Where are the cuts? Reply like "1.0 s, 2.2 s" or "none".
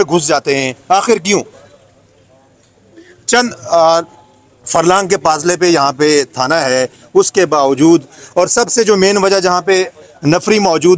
none